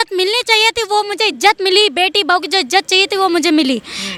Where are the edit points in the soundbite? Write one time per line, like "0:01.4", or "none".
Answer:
none